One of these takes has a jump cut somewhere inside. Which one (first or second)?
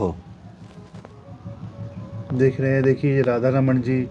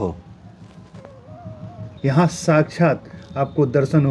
second